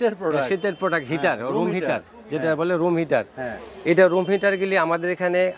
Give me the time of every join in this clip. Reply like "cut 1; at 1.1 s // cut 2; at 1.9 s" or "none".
none